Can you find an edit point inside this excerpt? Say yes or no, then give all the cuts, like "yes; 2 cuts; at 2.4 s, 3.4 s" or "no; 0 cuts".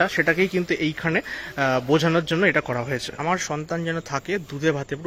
yes; 1 cut; at 3.1 s